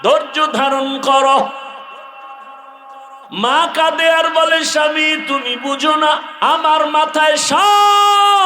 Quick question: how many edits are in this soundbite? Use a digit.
2